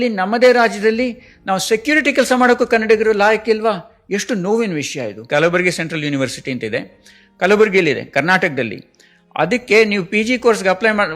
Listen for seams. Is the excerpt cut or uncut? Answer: cut